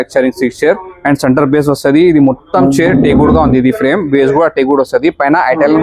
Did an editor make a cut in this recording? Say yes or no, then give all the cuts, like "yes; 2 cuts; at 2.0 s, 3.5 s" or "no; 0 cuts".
no; 0 cuts